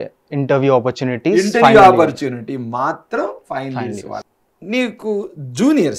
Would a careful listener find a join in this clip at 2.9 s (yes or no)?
no